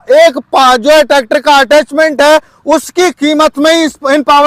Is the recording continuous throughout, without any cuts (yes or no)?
yes